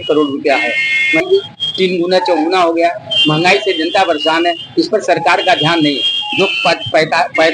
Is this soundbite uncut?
no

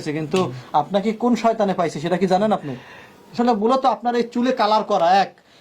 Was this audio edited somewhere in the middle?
yes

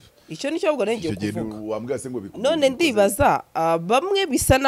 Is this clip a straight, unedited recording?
yes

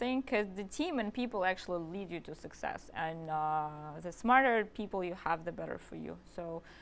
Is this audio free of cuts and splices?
yes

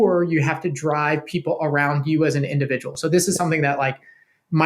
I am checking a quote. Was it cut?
yes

